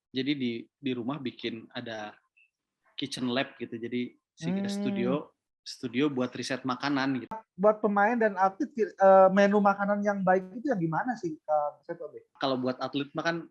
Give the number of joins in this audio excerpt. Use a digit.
2